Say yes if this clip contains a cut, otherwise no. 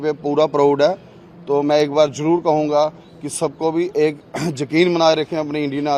no